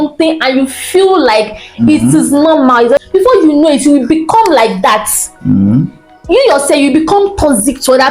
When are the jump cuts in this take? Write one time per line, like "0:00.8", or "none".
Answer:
0:03.0